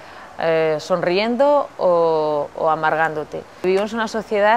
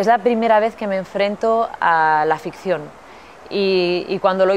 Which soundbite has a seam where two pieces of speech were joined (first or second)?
first